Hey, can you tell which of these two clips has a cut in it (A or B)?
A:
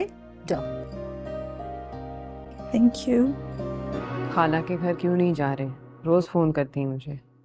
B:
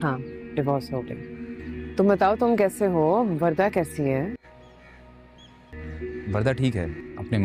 A